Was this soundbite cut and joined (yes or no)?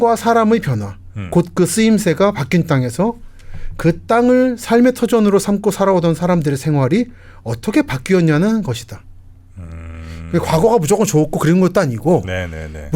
no